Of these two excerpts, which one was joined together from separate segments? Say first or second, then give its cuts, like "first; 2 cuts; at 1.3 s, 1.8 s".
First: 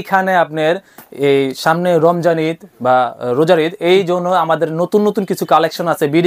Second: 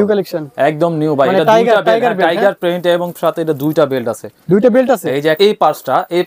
second; 1 cut; at 5.4 s